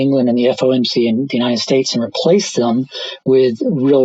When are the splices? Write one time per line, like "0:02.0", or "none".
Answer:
none